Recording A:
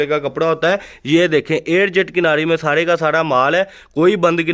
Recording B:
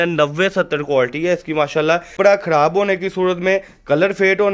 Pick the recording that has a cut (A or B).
B